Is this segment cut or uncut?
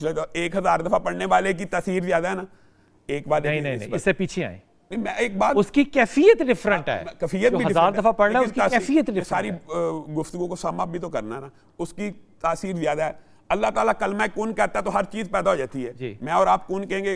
uncut